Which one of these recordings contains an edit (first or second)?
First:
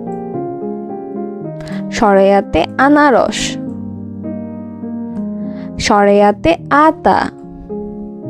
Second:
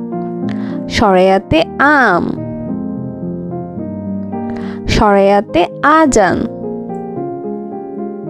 second